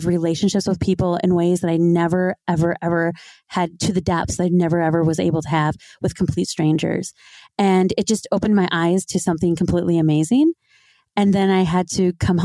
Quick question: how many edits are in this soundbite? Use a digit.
0